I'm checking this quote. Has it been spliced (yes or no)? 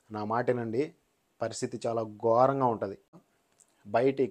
yes